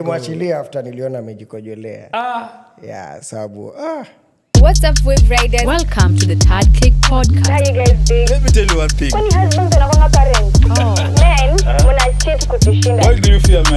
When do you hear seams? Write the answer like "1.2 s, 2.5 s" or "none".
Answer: 4.4 s